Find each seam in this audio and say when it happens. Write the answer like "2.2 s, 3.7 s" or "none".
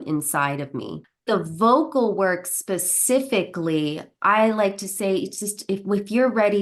1.2 s

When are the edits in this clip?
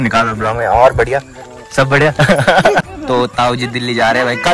2.8 s

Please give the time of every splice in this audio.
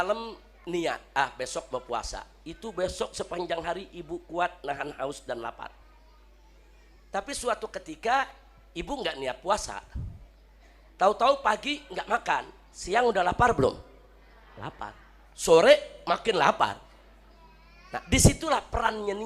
none

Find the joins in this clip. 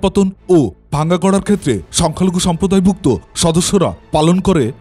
1.9 s

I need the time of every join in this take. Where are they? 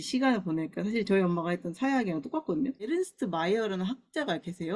2.9 s

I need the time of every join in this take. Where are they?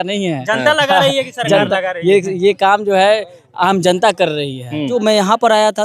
4.9 s

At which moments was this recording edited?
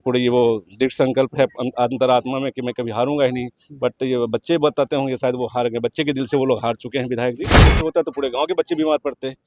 7.8 s

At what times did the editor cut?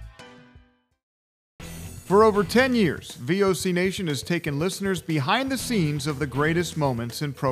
1.4 s

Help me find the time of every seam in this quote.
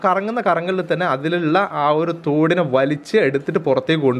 none

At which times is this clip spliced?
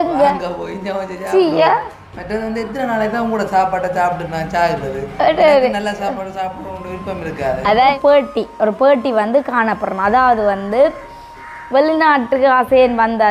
8.0 s

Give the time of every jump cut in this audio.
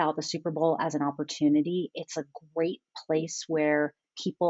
none

